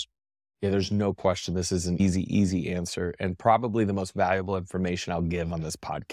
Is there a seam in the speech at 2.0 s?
yes; 1 cut; at 2.0 s

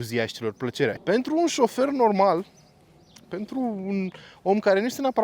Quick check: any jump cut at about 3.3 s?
no; 1 cut; at 1.0 s

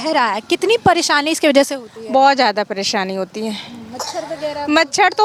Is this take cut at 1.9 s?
no; 0 cuts

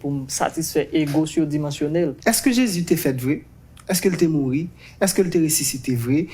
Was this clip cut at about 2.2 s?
yes; 1 cut; at 2.2 s

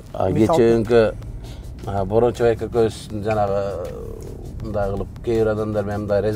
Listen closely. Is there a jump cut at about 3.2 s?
no; 0 cuts

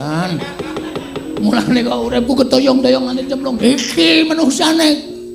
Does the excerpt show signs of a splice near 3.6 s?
yes; 1 cut; at 3.6 s

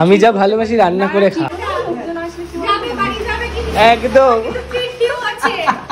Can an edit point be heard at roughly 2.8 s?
no; 1 cut; at 1.5 s

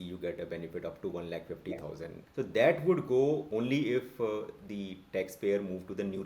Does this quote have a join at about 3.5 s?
yes; 2 cuts; at 2.2 s, 3.5 s

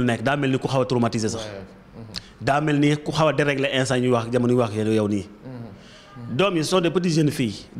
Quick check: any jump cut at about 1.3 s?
no; 0 cuts

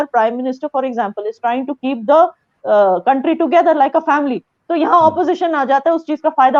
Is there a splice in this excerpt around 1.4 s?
no; 0 cuts

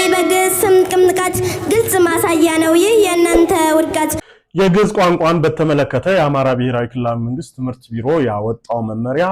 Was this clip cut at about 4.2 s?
yes; 1 cut; at 4.2 s

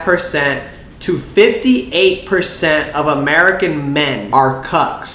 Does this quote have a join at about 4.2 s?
yes; 1 cut; at 4.2 s

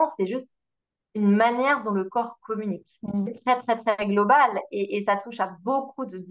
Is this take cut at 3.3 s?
yes; 1 cut; at 3.3 s

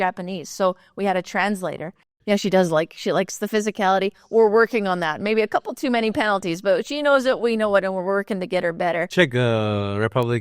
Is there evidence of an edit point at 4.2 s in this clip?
no; 2 cuts; at 2.1 s, 9.1 s

